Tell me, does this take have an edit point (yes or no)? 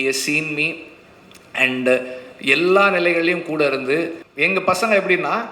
yes